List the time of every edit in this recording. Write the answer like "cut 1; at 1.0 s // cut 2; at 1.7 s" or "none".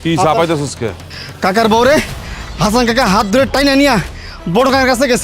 cut 1; at 1.1 s